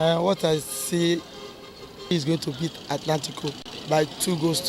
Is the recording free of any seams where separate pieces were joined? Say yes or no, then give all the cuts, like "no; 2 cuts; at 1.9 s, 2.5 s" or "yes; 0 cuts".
no; 1 cut; at 2.1 s